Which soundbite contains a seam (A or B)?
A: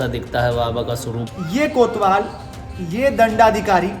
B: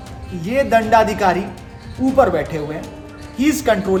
A